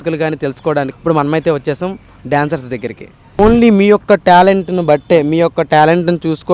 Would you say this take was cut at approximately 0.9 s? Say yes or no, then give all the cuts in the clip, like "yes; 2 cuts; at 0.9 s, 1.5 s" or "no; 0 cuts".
yes; 2 cuts; at 0.9 s, 3.4 s